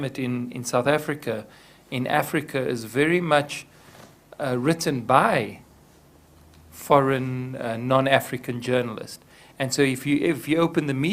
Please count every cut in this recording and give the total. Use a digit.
1